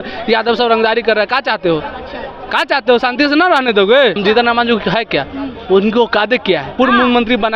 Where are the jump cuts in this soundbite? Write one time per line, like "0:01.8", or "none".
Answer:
0:04.2
0:06.7

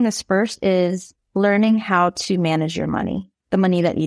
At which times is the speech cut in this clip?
none

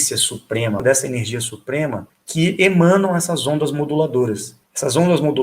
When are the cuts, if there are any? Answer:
0:00.8
0:02.0

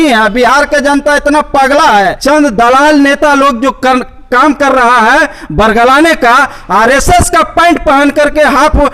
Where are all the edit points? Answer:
0:02.0

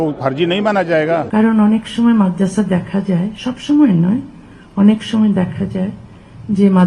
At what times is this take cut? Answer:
0:01.3

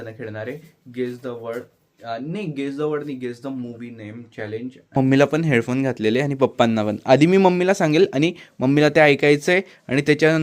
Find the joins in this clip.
0:05.0

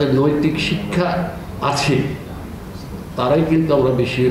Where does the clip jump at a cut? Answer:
none

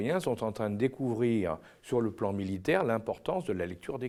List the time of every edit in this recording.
none

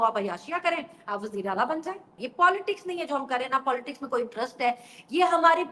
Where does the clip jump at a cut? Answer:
0:02.1

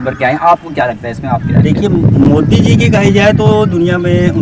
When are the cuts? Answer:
none

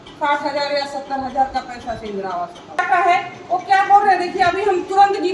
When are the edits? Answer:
0:02.8

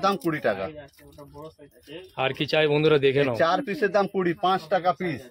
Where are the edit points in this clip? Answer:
none

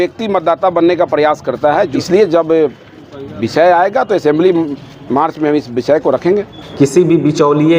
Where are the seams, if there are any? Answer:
0:02.0
0:06.5

